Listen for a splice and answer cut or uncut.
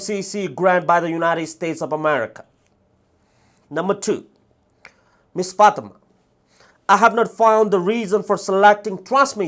uncut